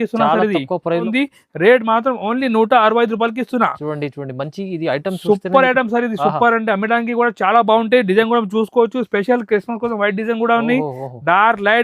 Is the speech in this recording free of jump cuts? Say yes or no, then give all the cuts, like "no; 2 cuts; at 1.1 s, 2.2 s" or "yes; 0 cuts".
no; 1 cut; at 1.1 s